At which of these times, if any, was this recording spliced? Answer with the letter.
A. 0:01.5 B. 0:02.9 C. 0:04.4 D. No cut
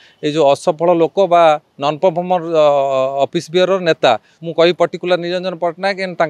C